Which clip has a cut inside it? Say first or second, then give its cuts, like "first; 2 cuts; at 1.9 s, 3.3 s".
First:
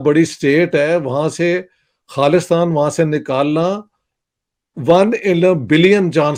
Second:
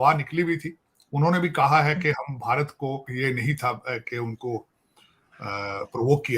second; 1 cut; at 3.1 s